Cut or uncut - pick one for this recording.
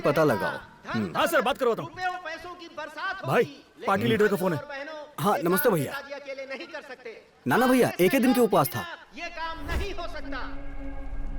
uncut